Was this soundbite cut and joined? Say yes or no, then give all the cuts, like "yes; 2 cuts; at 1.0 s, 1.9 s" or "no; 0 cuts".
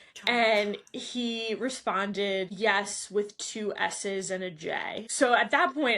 yes; 2 cuts; at 2.5 s, 5.1 s